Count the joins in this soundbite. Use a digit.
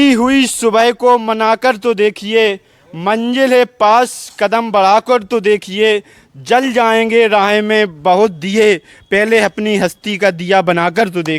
0